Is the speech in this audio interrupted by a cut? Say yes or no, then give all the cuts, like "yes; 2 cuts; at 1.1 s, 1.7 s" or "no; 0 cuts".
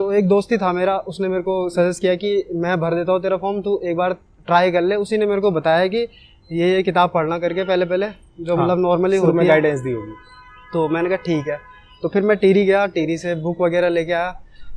no; 0 cuts